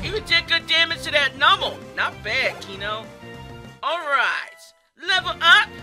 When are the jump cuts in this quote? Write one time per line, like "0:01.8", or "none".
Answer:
0:01.9